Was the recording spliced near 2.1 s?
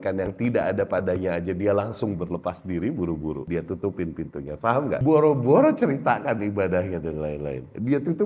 no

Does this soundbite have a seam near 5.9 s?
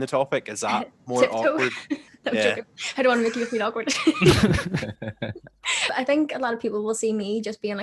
yes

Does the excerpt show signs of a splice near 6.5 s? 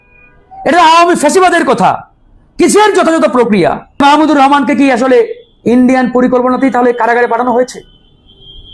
no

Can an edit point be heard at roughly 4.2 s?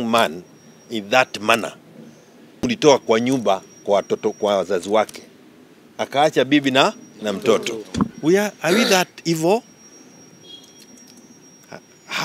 no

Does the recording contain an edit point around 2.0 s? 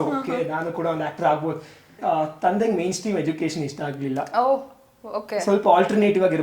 yes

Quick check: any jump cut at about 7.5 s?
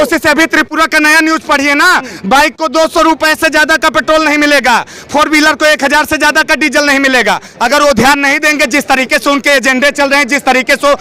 yes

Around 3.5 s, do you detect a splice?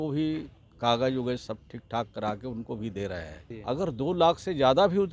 yes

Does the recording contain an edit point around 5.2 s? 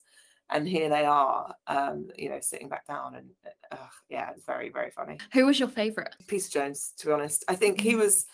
yes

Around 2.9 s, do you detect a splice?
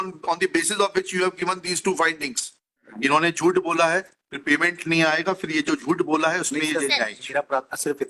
yes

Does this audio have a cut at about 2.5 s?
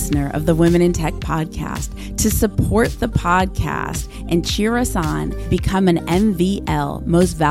no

